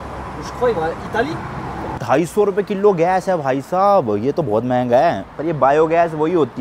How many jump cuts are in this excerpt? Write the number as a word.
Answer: one